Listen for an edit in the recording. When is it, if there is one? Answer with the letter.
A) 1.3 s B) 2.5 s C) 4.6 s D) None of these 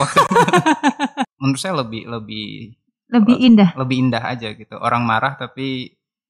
A